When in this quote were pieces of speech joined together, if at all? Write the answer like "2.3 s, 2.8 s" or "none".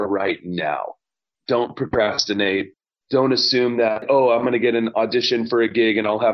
1.2 s, 4.0 s

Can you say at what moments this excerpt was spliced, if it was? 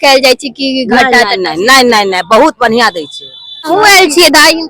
3.6 s

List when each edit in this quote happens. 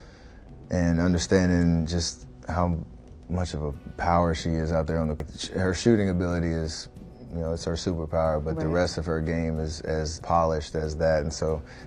none

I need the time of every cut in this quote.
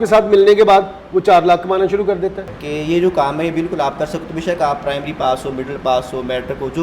2.5 s

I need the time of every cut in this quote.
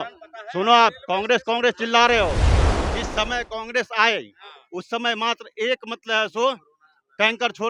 none

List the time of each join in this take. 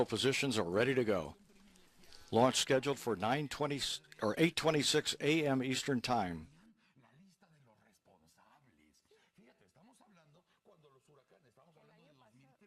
none

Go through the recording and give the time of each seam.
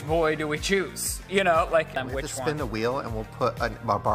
2.0 s

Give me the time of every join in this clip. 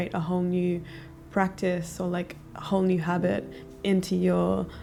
none

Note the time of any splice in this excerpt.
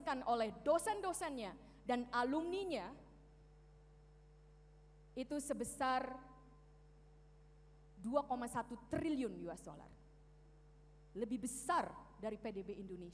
none

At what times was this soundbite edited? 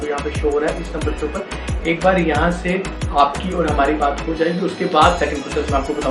none

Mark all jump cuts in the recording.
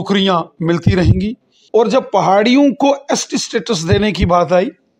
1.5 s

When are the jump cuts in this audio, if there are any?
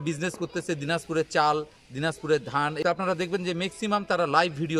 2.8 s

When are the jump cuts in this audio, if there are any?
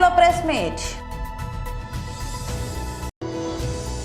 3.2 s

